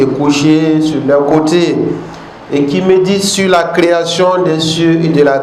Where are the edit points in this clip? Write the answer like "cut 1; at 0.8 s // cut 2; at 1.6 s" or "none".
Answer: none